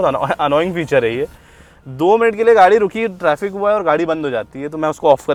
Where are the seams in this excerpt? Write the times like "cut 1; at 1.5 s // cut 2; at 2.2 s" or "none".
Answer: none